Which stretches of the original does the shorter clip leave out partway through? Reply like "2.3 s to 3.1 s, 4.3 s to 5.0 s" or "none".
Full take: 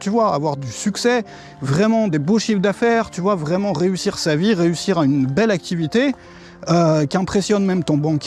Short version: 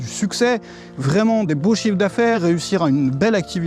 3.0 s to 4.6 s